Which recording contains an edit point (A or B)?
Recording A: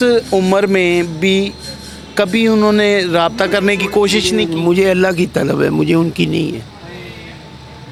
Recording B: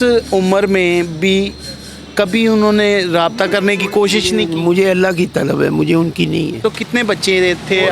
B